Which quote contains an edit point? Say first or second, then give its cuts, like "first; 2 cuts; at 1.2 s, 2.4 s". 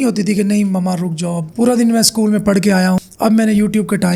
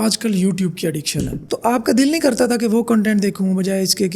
second; 1 cut; at 1.4 s